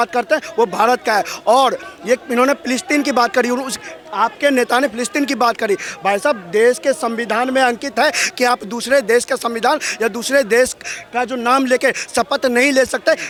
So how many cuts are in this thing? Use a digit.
0